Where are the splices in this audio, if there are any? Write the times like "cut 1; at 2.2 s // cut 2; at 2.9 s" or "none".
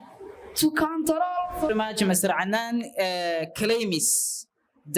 cut 1; at 1.7 s